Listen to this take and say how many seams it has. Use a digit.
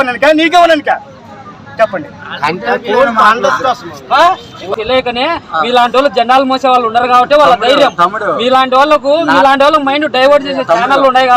1